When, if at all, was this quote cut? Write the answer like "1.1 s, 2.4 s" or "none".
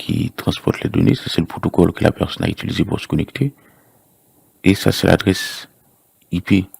4.5 s